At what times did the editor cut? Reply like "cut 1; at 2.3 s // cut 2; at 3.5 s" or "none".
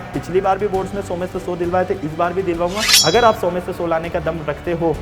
cut 1; at 2.9 s